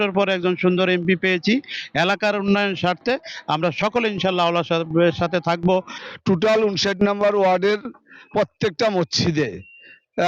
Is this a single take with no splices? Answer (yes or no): no